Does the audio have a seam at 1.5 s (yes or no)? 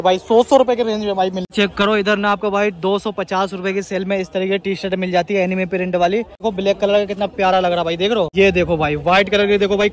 yes